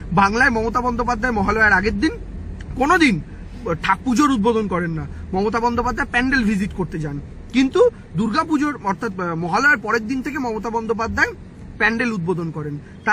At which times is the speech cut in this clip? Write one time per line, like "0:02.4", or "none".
0:06.8